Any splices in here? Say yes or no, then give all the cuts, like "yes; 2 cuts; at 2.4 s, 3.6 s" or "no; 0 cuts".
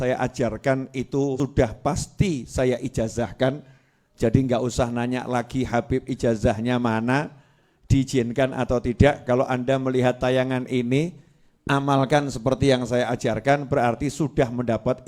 yes; 1 cut; at 1.4 s